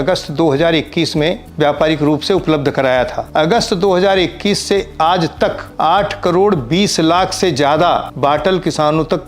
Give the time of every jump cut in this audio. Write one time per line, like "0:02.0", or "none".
0:01.5
0:03.2
0:05.6
0:08.1